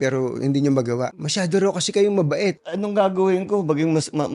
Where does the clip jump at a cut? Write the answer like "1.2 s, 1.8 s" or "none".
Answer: 1.2 s, 2.7 s